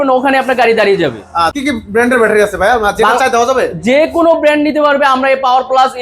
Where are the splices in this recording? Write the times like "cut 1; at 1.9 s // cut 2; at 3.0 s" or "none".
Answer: cut 1; at 1.5 s